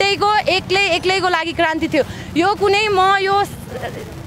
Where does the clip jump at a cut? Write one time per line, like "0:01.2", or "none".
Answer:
none